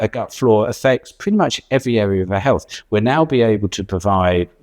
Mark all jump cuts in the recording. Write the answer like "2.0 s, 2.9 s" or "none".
2.7 s